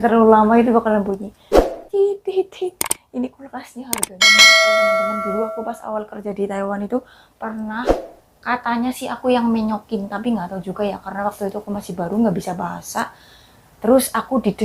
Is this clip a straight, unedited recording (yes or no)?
yes